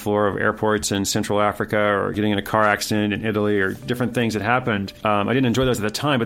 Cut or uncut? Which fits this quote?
cut